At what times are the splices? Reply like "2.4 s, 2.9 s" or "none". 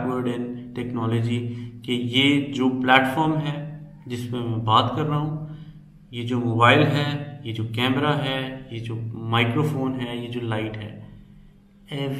none